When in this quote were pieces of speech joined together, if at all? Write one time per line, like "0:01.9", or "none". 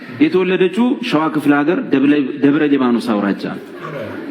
none